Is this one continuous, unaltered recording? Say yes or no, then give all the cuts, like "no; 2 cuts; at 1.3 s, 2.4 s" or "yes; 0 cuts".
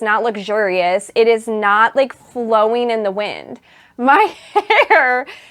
yes; 0 cuts